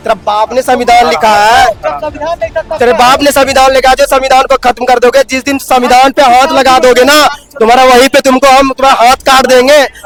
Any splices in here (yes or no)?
no